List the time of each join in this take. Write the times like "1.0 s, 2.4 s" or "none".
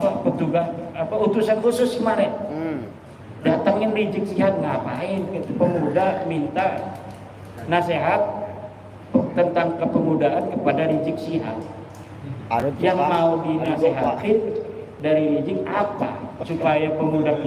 none